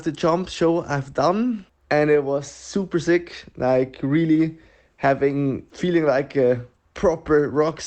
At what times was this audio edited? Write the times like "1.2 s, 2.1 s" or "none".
1.7 s, 5.7 s